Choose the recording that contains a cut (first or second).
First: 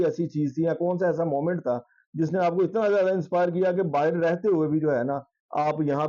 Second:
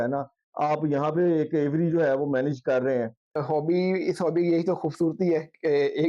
second